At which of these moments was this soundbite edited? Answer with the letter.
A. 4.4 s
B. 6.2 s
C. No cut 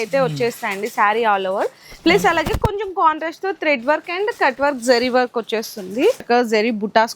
B